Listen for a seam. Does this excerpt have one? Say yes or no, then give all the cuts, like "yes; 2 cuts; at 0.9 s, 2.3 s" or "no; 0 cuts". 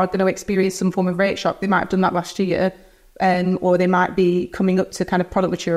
no; 0 cuts